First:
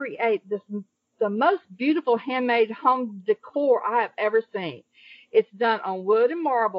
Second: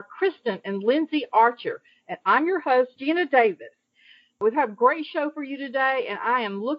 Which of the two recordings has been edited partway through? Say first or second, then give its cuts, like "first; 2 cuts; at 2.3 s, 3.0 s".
second; 2 cuts; at 3.0 s, 4.4 s